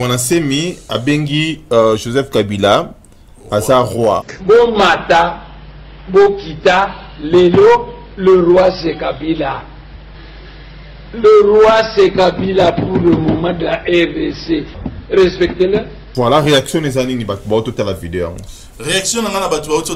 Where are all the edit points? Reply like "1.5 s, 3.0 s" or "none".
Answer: 16.0 s